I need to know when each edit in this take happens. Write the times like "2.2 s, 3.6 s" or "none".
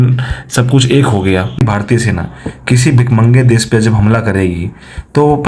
1.6 s